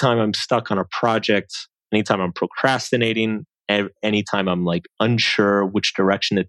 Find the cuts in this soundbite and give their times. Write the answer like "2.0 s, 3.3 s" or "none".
none